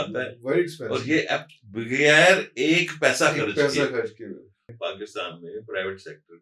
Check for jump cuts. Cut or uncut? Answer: cut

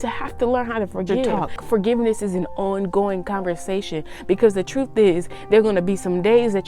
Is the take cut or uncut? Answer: cut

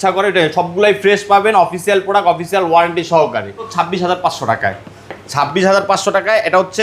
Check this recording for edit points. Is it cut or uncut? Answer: cut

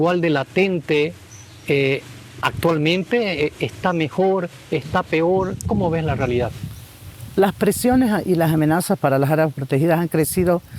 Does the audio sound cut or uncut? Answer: uncut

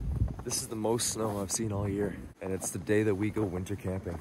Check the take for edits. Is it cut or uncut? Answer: cut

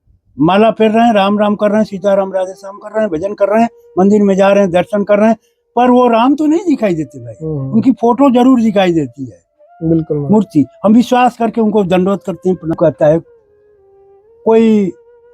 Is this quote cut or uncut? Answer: cut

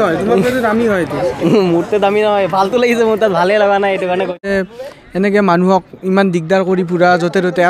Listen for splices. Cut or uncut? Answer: cut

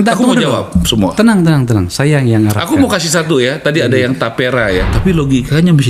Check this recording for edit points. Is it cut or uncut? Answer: cut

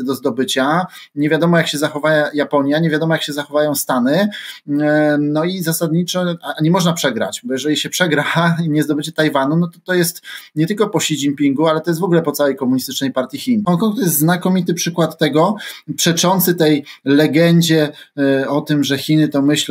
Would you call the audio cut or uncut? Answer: cut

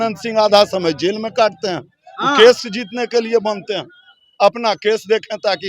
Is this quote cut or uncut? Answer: uncut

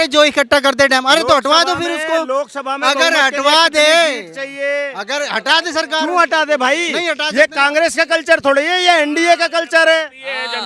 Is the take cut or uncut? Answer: uncut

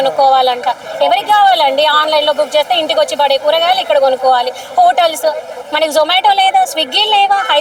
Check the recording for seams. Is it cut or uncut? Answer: uncut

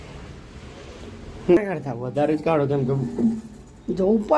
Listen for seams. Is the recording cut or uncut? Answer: cut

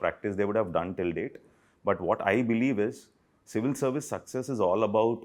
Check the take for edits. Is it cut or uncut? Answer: uncut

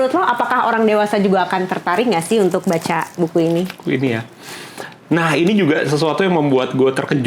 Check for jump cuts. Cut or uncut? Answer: uncut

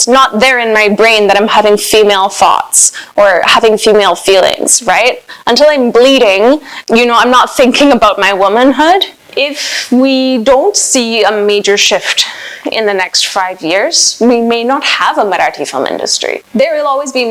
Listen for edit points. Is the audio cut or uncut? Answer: cut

